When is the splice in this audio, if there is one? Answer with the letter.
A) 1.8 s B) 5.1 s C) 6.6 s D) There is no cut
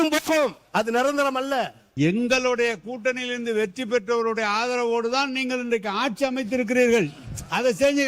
A